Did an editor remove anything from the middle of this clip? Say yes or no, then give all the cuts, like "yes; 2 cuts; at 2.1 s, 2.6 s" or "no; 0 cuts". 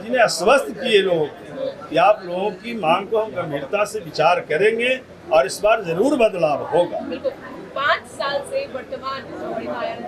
no; 0 cuts